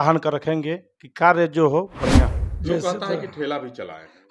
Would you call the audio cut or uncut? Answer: cut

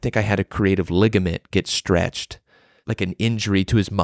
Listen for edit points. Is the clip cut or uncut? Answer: cut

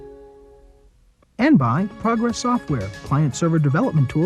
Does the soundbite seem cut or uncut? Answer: cut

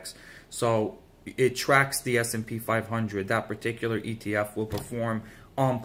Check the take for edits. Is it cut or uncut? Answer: uncut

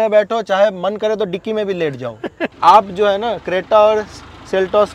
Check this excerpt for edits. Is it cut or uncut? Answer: cut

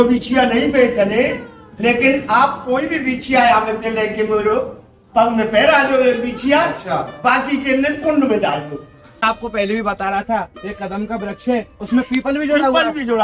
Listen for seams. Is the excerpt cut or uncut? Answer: cut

